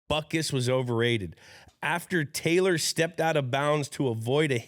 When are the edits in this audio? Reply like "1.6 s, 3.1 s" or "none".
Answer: none